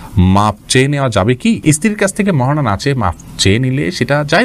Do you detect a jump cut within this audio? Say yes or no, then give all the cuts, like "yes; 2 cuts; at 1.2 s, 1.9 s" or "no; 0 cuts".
no; 0 cuts